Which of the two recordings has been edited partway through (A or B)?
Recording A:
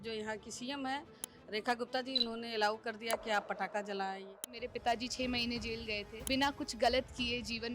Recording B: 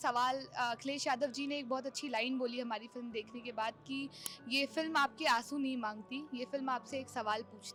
A